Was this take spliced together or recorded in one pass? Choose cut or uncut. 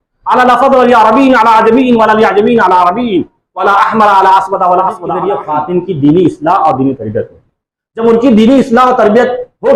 cut